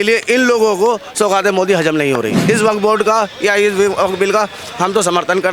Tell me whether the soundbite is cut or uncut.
cut